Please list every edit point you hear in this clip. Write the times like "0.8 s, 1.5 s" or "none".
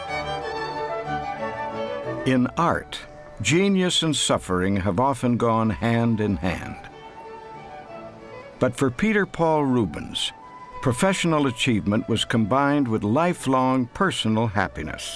none